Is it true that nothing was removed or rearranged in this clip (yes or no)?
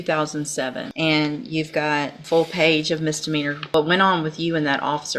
no